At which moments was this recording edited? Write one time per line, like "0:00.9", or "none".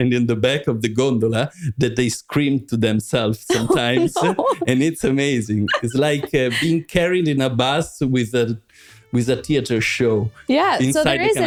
none